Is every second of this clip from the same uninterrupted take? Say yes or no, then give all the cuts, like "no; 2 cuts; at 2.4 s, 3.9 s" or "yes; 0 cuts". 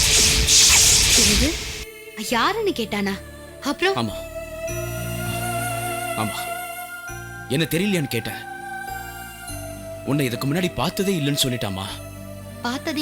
yes; 0 cuts